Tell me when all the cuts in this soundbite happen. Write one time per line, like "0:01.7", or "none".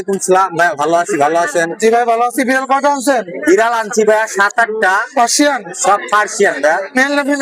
none